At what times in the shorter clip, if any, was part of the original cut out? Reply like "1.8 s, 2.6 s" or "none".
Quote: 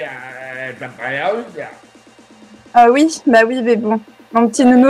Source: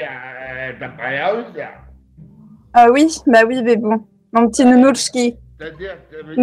none